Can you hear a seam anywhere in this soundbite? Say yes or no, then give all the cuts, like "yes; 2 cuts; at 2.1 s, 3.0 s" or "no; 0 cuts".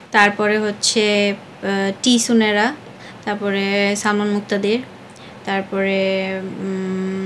no; 0 cuts